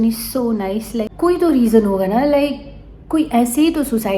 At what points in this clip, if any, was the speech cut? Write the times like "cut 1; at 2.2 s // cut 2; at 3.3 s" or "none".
cut 1; at 1.1 s